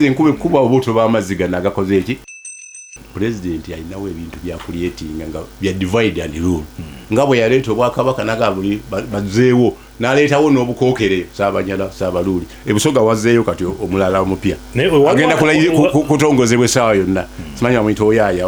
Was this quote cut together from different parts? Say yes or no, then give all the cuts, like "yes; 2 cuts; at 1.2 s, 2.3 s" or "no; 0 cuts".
yes; 1 cut; at 2.6 s